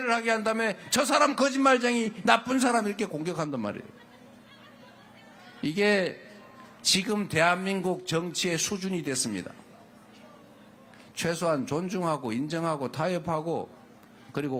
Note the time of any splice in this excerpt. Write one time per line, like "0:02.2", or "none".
none